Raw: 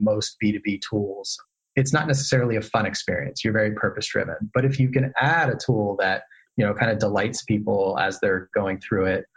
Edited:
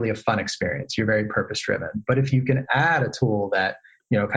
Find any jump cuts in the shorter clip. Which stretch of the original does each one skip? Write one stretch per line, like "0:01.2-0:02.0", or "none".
none